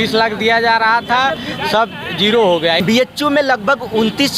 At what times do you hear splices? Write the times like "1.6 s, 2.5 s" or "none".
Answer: 2.8 s